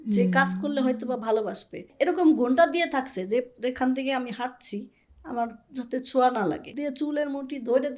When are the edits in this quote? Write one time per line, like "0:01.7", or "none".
0:01.8
0:06.7

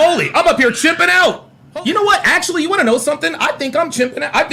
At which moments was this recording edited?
0:01.6

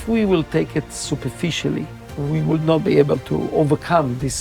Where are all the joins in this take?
0:03.5

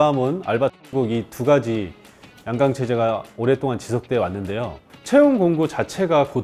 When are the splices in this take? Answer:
0:04.8

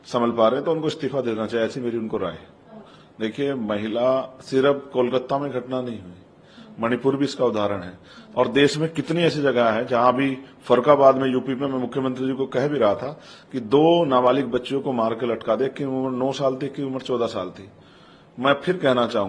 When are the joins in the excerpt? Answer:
none

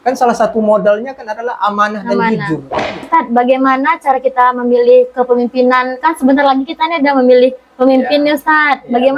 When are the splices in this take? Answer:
0:03.1

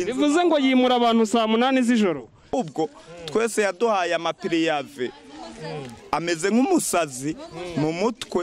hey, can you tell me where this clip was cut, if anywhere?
0:02.5

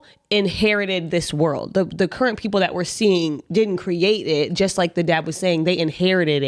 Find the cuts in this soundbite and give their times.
none

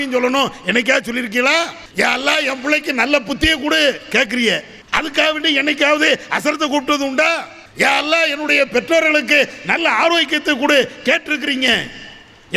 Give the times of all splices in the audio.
0:01.8
0:04.8
0:07.6

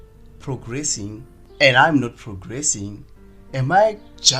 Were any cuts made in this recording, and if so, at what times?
0:01.4

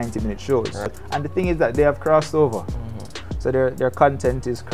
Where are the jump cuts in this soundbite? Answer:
0:01.0

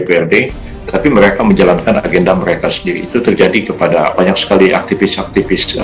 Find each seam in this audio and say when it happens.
0:04.1

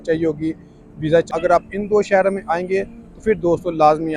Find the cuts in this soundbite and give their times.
0:01.3

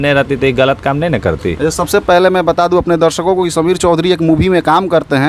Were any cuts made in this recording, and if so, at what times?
none

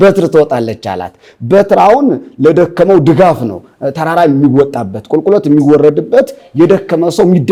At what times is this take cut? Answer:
none

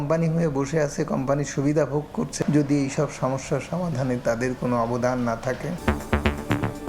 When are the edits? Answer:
0:02.3
0:05.8

